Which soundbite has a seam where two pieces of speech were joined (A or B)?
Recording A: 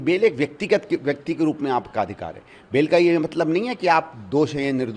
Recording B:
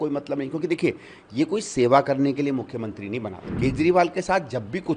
B